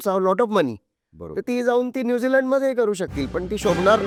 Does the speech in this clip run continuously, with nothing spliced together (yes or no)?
yes